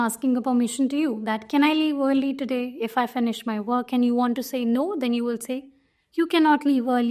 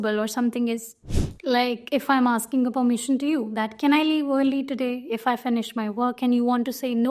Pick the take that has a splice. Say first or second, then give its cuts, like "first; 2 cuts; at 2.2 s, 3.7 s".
second; 1 cut; at 1.2 s